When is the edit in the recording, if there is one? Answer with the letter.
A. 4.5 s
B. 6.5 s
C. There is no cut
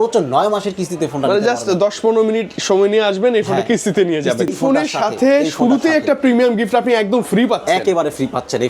A